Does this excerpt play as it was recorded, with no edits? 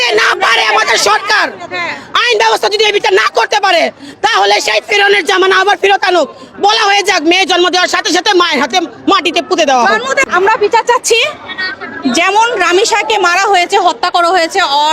no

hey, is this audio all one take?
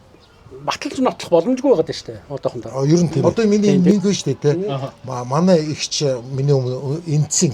no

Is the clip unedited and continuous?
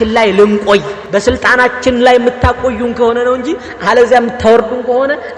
no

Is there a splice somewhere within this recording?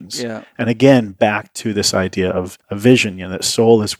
yes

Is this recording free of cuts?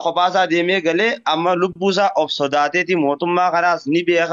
yes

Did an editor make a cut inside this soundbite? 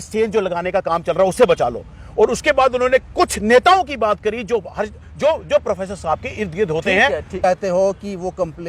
yes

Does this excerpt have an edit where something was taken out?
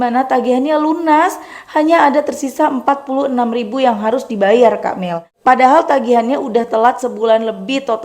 yes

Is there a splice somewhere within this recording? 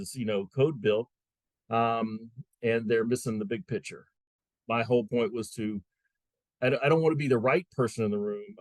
yes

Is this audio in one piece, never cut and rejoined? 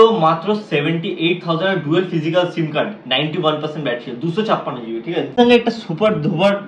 no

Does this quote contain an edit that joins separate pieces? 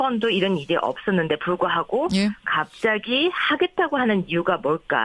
yes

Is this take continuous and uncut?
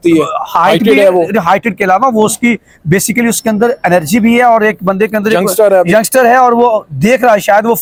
yes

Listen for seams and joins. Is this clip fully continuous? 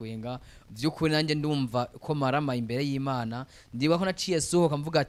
yes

